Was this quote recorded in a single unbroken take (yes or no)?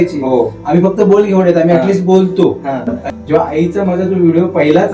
no